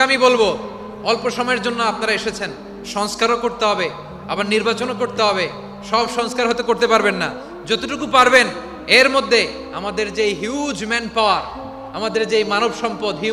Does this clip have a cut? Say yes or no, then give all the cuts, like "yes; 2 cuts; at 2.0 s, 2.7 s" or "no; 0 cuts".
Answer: no; 0 cuts